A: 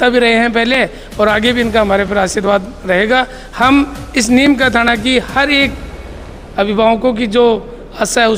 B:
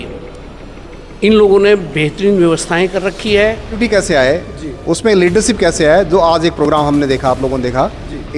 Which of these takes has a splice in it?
B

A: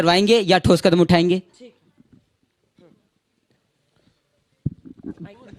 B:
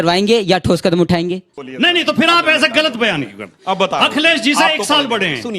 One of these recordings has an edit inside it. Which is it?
B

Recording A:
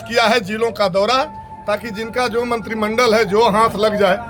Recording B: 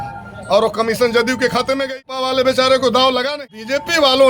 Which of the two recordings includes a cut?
B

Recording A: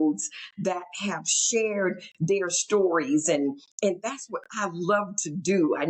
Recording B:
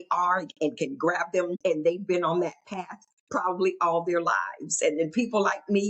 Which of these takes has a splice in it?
B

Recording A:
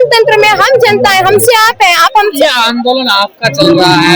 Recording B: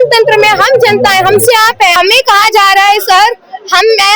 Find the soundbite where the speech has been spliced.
B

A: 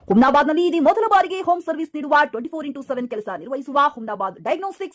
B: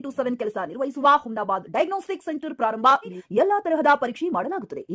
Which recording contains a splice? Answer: B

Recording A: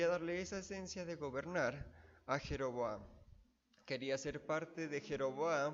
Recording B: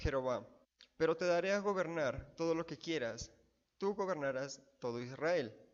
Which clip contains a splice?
B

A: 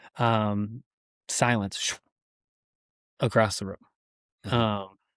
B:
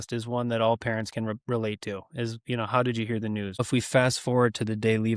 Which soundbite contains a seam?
B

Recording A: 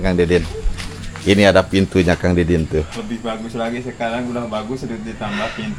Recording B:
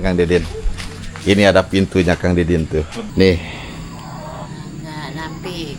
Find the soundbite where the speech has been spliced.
B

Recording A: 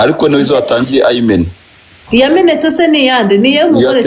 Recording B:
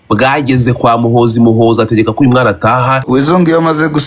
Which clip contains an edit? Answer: B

